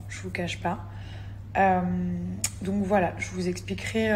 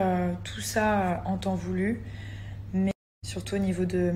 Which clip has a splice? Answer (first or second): second